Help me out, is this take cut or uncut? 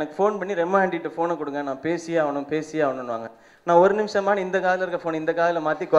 uncut